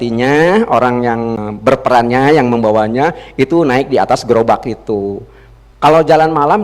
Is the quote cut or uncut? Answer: cut